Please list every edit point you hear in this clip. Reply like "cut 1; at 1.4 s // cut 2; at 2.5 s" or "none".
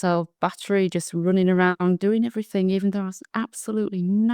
none